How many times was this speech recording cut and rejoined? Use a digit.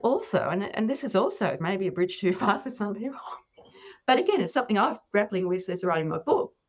1